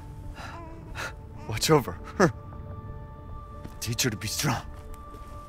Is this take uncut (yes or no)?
yes